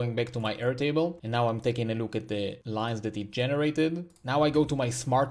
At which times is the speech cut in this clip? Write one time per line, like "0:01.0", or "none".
0:01.2
0:02.6
0:04.1